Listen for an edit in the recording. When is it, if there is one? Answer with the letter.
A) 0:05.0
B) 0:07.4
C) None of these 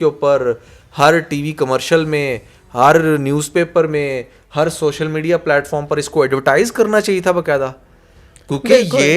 C